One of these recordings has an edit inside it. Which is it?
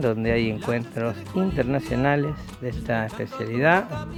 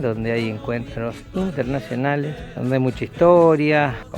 second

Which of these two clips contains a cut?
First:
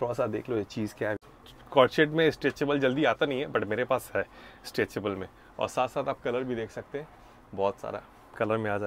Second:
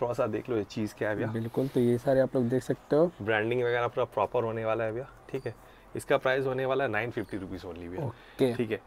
first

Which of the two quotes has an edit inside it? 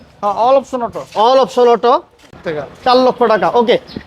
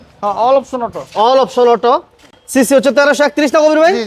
first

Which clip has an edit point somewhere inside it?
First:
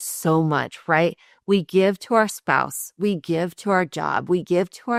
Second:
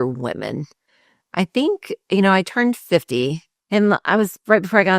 second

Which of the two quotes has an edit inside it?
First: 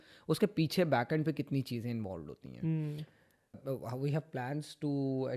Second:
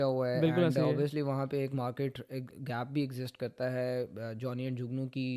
first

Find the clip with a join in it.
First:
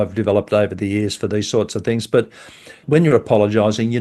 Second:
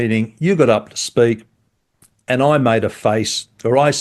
first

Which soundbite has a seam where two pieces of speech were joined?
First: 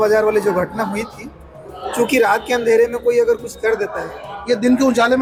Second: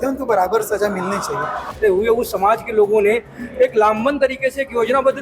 second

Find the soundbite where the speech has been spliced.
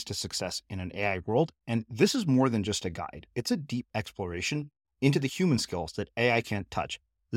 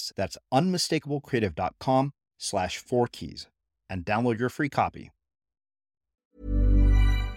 second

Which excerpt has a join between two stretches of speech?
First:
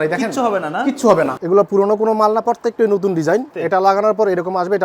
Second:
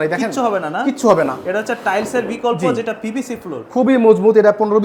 first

